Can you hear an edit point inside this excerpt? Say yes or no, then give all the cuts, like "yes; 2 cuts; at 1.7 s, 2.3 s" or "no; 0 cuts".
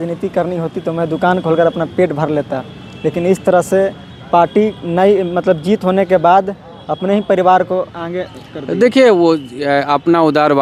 no; 0 cuts